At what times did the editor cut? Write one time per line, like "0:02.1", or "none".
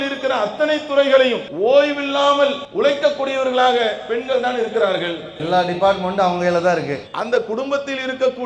0:01.5
0:02.6